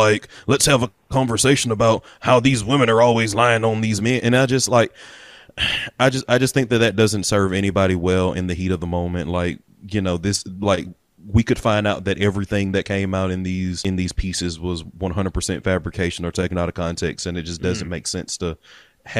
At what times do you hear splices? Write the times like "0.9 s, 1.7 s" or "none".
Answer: 13.8 s